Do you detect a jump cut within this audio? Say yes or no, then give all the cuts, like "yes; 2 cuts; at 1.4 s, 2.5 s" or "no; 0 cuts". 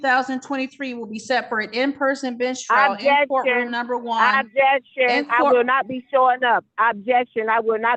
no; 0 cuts